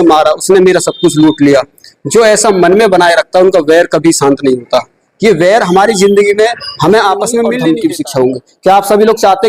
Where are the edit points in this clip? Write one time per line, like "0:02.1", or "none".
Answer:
0:07.6